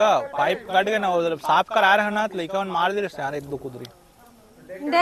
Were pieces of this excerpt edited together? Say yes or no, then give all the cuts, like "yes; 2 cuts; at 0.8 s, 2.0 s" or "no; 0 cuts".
no; 0 cuts